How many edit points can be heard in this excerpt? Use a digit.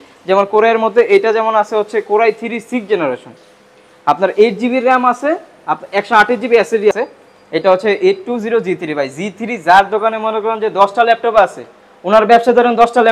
1